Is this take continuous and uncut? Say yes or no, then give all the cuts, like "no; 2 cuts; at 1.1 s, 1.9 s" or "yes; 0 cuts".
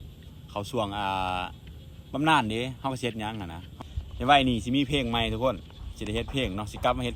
no; 1 cut; at 3.6 s